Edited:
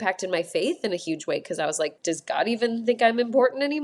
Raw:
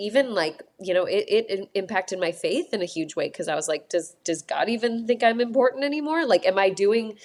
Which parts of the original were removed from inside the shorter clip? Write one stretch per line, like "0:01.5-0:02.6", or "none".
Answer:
0:03.8-0:04.2